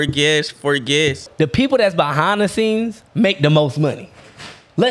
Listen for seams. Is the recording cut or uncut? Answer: cut